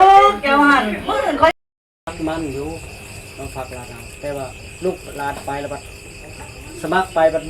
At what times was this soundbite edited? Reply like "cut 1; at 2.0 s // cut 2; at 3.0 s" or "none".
cut 1; at 1.5 s